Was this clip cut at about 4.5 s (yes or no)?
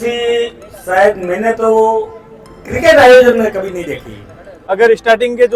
yes